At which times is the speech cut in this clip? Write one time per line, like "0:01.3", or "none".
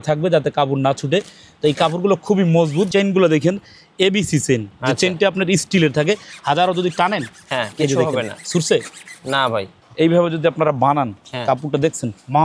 0:02.9
0:09.7